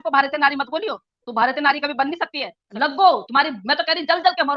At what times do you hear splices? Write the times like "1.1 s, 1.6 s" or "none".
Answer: 2.6 s